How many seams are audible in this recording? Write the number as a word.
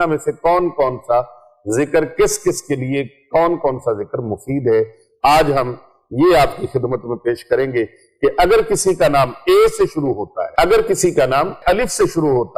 two